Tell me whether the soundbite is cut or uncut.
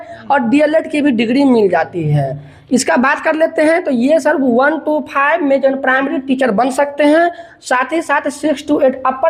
uncut